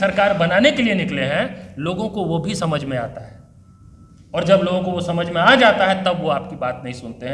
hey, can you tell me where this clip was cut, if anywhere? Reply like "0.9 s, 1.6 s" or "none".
none